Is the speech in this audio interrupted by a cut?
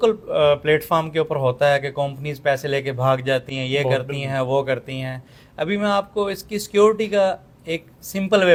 no; 0 cuts

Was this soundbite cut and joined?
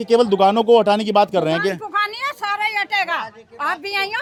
no; 0 cuts

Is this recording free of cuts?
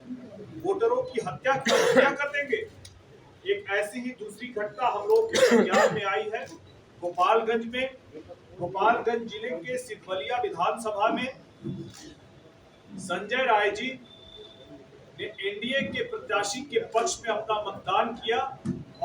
yes; 0 cuts

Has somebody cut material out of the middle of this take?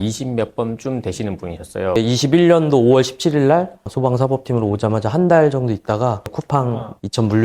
yes; 1 cut; at 1.9 s

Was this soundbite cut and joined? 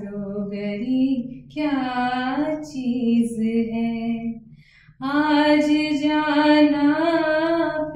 no; 0 cuts

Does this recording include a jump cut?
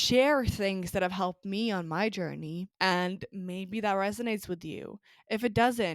yes; 1 cut; at 2.7 s

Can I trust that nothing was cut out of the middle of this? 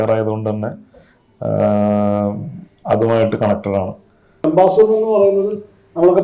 no; 1 cut; at 4.4 s

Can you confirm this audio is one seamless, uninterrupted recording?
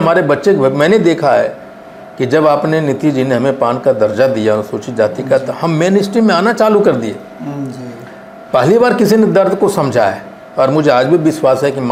yes; 0 cuts

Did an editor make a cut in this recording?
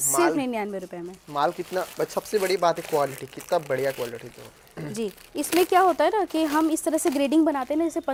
no; 0 cuts

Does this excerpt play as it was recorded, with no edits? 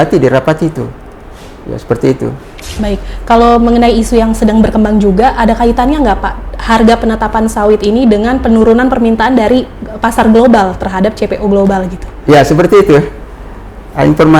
no; 1 cut; at 2.6 s

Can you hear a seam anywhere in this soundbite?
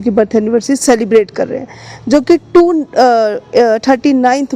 no; 0 cuts

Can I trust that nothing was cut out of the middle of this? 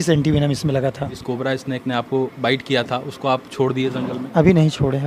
no; 1 cut; at 1.2 s

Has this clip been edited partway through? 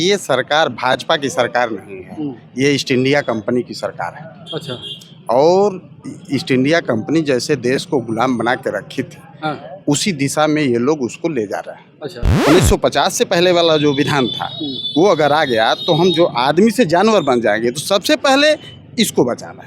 yes; 1 cut; at 12.3 s

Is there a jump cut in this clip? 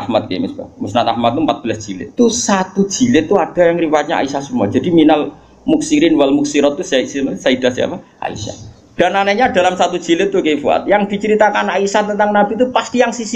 yes; 1 cut; at 2.1 s

